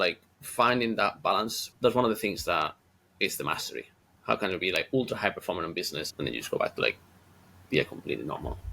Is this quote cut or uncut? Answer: cut